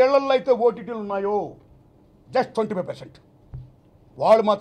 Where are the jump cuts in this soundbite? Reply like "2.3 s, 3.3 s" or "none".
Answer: none

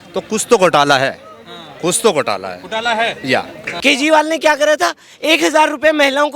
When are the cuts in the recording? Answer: 3.7 s

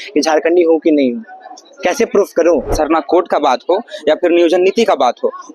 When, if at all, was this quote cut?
2.7 s

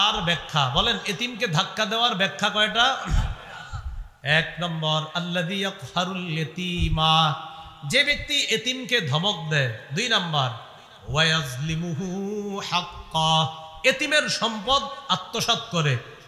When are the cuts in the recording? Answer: none

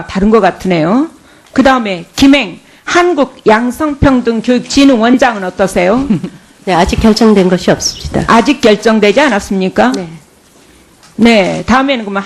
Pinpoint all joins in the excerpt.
none

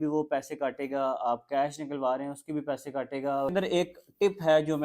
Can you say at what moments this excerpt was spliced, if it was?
3.5 s

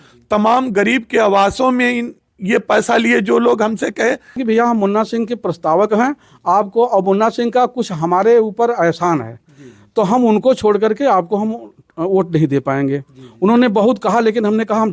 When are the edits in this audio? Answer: 4.4 s

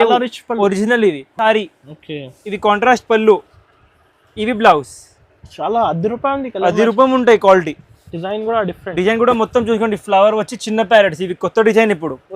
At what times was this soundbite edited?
1.3 s

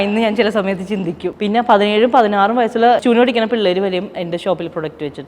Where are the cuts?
1.3 s, 3.0 s

